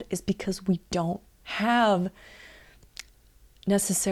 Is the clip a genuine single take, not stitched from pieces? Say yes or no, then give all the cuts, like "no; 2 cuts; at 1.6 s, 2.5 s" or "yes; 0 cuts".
yes; 0 cuts